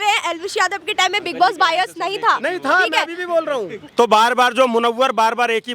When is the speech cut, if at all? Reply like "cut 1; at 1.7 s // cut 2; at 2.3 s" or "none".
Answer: cut 1; at 3.8 s